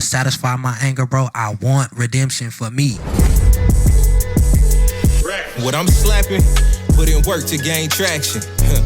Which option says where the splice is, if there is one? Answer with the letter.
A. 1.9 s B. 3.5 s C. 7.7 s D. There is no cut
B